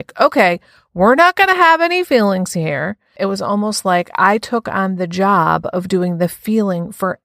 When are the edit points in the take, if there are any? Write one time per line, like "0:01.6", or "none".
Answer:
0:03.1